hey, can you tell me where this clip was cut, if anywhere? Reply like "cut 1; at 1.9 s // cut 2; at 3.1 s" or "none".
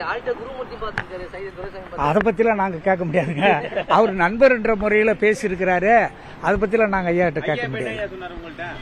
none